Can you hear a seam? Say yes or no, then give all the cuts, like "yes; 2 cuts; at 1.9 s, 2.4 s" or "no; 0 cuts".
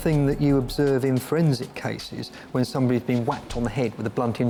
no; 0 cuts